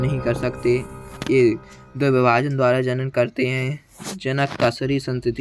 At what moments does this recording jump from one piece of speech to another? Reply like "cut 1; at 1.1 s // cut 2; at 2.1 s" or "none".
none